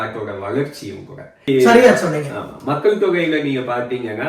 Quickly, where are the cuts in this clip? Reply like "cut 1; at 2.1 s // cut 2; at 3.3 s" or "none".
cut 1; at 1.5 s